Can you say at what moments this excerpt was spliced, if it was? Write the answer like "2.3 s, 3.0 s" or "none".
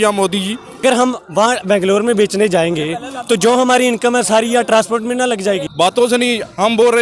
0.8 s, 5.7 s